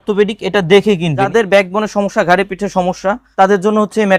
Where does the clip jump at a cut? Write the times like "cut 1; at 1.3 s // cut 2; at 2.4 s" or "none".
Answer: cut 1; at 1.3 s // cut 2; at 3.2 s